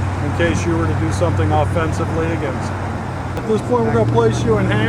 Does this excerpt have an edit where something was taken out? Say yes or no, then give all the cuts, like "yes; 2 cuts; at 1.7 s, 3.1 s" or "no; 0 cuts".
yes; 1 cut; at 3.4 s